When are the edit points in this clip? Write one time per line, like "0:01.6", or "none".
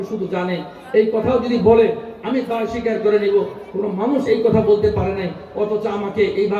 none